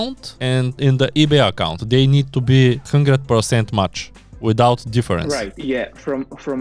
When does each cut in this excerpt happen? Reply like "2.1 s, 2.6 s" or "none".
none